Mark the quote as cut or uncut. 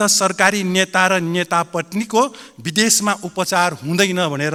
uncut